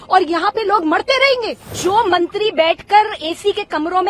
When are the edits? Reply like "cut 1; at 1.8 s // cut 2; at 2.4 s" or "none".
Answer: cut 1; at 1.7 s